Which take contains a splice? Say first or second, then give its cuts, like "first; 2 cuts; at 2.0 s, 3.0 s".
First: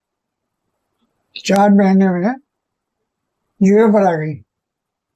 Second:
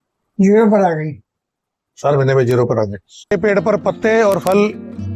second; 1 cut; at 3.3 s